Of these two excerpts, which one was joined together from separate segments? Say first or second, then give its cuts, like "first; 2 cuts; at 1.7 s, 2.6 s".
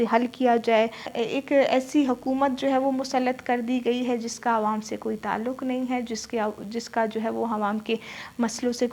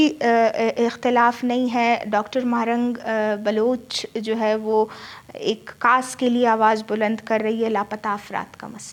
first; 1 cut; at 1.1 s